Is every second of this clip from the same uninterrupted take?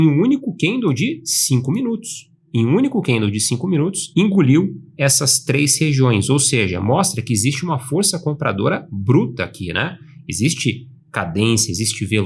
yes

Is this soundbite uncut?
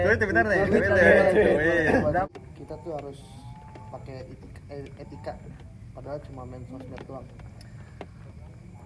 no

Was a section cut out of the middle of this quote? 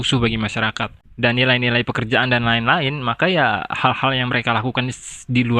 yes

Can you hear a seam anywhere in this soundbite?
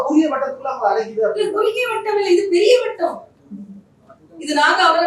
no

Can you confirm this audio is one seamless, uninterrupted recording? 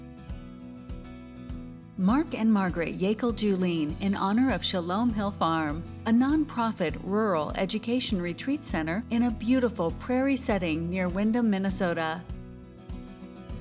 no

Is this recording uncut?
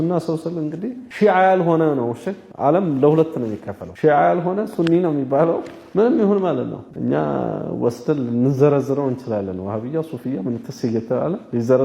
no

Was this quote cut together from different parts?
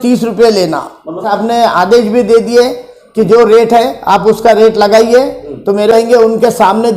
yes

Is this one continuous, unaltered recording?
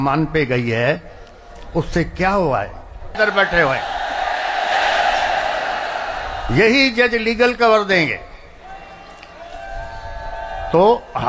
no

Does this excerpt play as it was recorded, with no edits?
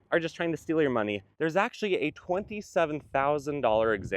no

